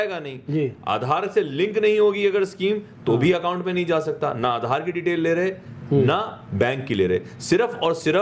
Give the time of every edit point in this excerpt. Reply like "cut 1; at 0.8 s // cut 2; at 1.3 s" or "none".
none